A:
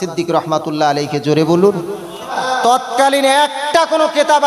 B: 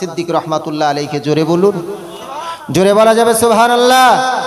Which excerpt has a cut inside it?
A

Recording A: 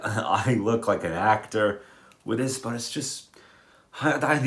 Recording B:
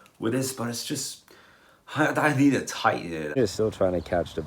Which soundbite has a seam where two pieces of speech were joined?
B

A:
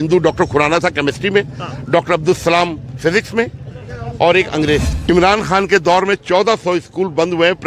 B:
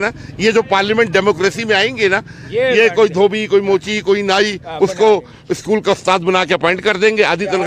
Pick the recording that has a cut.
A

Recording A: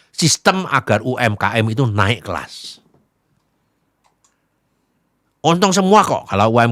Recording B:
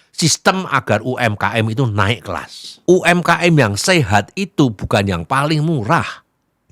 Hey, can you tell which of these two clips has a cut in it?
B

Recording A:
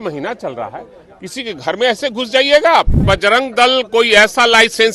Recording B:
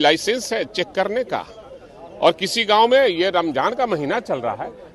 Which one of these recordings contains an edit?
A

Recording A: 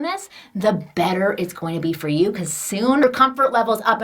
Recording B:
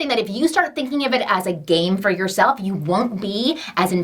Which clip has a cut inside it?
A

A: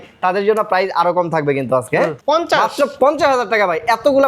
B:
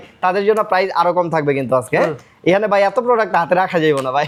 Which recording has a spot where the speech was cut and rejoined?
A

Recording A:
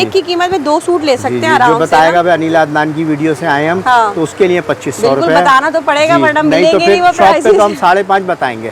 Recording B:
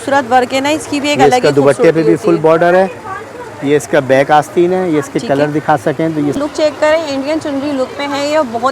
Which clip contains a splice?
B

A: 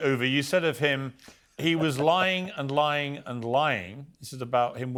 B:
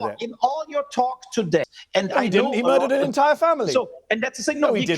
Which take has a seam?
B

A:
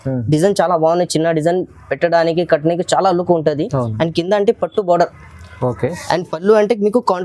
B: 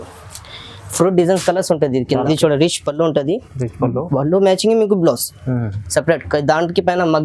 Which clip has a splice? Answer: B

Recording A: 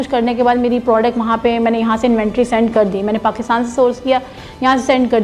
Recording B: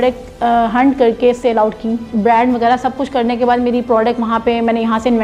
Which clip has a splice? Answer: B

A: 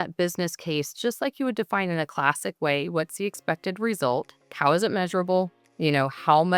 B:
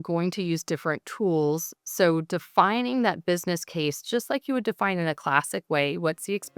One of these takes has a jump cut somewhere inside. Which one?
A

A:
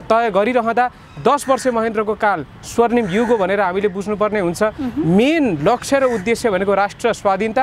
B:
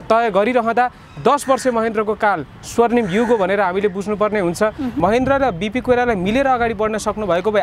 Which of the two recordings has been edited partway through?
B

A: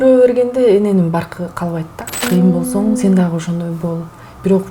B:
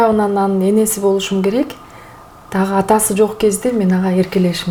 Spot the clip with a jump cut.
A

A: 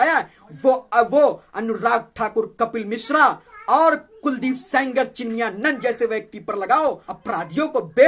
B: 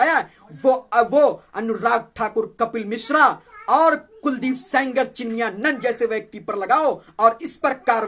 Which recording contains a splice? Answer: A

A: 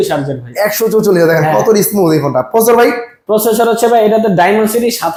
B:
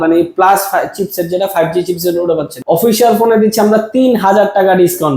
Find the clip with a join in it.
B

